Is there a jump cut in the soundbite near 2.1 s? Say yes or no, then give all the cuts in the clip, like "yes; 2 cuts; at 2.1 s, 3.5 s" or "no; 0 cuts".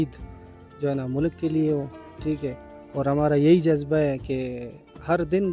no; 0 cuts